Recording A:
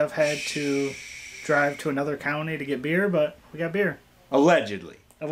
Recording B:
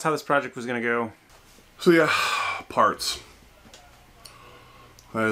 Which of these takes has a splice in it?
B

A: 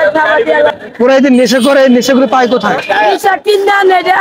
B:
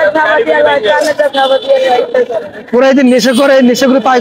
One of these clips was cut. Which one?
A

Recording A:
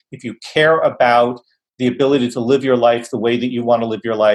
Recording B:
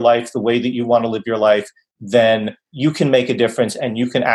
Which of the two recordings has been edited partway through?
B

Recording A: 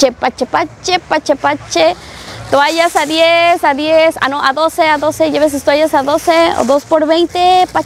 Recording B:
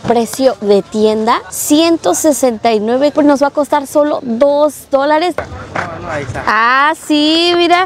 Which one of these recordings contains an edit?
B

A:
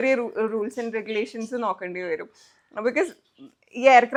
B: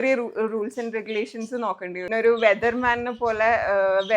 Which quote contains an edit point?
B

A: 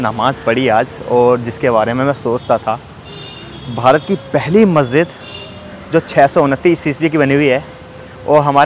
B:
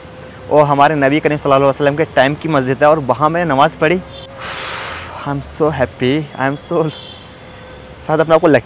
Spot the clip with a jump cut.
B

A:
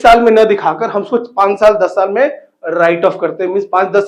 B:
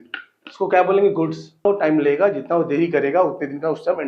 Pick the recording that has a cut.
B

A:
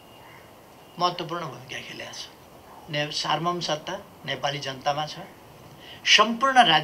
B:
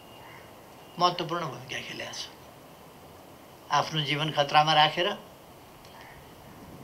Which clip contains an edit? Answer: A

